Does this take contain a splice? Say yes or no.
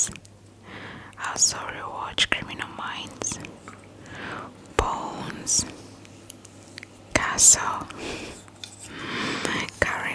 no